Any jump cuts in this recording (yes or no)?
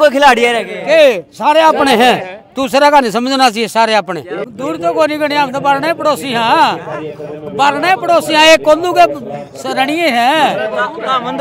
yes